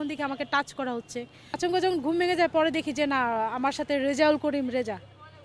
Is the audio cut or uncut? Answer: cut